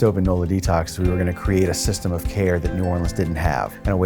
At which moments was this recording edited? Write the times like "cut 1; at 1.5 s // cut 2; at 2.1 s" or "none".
cut 1; at 0.9 s